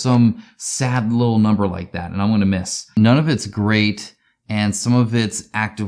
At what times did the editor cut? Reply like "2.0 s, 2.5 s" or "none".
2.9 s